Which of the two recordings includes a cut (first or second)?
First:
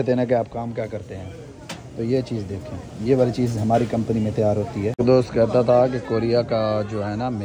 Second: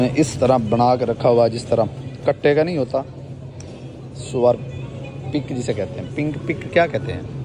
first